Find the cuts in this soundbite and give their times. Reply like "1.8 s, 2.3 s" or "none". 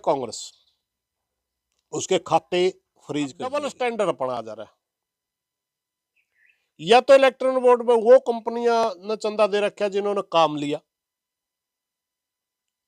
3.5 s